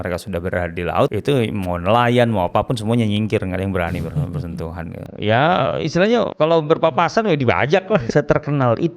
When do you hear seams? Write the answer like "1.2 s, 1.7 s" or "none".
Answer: 1.1 s, 6.3 s, 8.1 s